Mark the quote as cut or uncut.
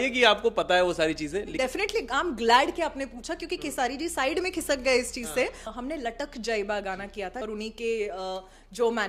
cut